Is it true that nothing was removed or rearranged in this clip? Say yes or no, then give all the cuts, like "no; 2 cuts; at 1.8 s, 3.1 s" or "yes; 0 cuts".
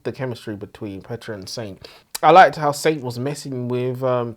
no; 1 cut; at 2.0 s